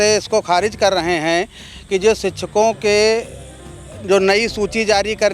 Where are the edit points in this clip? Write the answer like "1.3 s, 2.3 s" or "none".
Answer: none